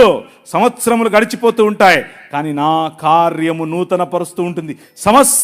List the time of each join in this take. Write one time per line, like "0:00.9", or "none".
none